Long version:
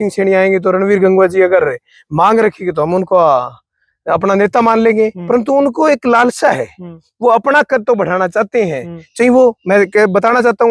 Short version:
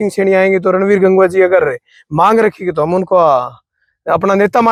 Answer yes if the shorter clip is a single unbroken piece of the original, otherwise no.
yes